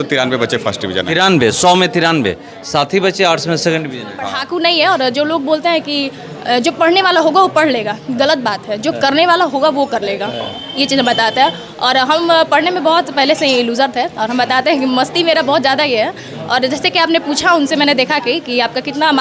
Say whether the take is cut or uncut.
cut